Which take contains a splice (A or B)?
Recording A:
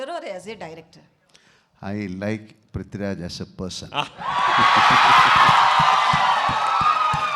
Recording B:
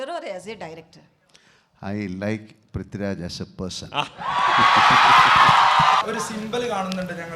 B